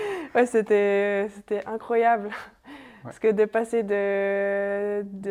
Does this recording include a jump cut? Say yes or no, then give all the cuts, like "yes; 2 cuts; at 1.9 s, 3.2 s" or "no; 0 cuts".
no; 0 cuts